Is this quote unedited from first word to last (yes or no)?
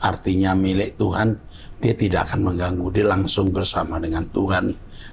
yes